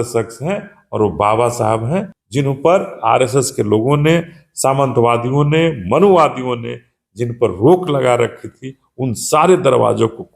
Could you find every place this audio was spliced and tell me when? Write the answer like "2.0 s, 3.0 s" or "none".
2.2 s